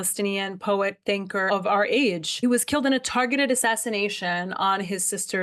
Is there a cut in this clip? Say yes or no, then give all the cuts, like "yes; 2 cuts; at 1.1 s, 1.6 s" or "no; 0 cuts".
yes; 1 cut; at 1.5 s